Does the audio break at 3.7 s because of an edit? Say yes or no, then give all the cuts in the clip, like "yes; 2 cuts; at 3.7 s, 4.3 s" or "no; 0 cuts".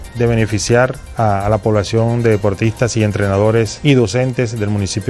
yes; 2 cuts; at 1.0 s, 3.7 s